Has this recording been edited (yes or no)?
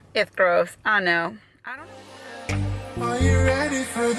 yes